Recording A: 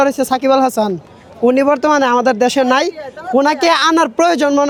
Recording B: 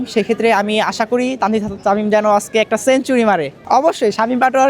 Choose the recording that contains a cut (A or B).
B